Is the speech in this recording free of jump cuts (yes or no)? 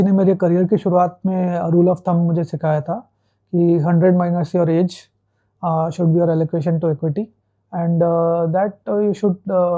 yes